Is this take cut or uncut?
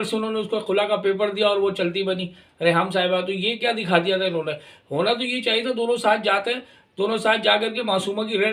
uncut